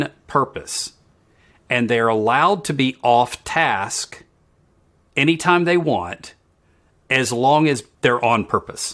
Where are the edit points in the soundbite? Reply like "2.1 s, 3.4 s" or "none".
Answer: 7.9 s